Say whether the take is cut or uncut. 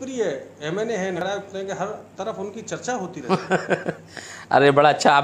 cut